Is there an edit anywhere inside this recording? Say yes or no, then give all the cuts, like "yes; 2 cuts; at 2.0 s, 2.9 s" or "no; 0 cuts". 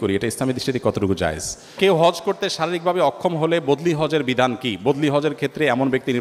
yes; 1 cut; at 1.7 s